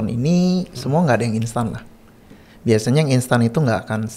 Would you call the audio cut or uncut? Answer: uncut